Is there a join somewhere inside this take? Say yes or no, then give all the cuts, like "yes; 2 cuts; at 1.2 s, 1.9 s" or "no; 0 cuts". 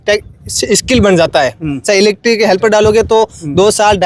no; 0 cuts